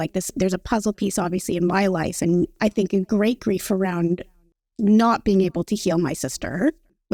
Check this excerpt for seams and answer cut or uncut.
uncut